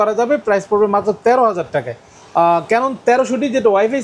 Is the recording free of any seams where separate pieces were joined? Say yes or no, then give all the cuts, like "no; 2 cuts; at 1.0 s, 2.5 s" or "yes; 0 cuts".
yes; 0 cuts